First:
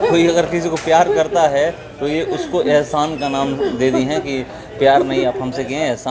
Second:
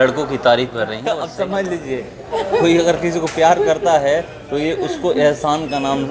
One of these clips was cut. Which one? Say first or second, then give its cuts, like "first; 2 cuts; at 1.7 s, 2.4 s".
second; 1 cut; at 1.0 s